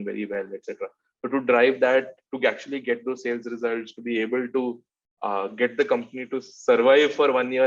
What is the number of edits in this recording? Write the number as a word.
zero